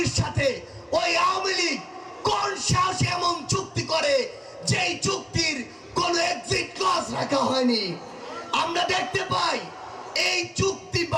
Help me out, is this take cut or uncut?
uncut